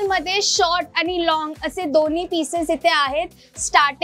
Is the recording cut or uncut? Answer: uncut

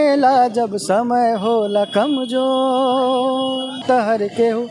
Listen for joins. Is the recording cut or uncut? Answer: cut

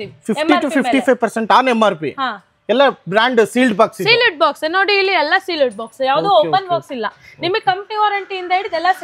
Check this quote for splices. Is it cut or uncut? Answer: uncut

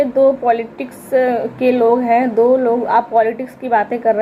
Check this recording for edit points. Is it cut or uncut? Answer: uncut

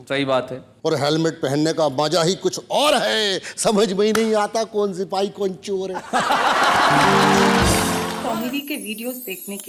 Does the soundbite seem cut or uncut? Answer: cut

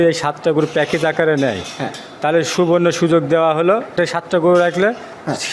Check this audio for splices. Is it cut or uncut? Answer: cut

